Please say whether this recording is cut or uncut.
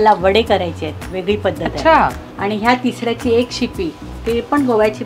uncut